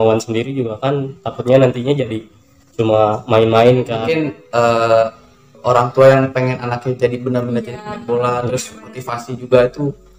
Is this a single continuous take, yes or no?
no